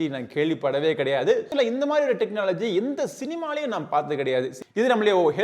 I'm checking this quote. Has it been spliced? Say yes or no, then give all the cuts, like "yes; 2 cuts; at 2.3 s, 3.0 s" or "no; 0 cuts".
yes; 2 cuts; at 1.5 s, 4.6 s